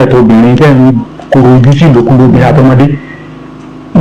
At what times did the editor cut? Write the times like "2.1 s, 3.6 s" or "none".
none